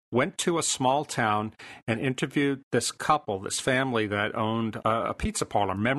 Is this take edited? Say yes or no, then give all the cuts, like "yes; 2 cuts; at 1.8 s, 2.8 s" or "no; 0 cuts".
yes; 1 cut; at 4.8 s